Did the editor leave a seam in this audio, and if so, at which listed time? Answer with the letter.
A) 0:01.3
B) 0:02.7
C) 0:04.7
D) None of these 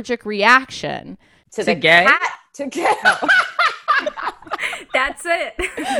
C